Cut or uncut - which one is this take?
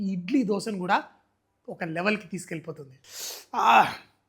cut